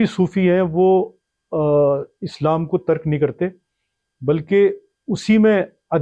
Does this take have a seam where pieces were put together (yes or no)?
no